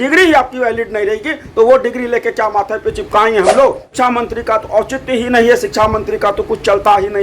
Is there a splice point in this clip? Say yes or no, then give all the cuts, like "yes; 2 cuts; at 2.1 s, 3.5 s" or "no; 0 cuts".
yes; 1 cut; at 3.9 s